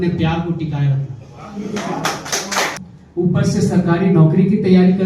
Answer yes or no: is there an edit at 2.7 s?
yes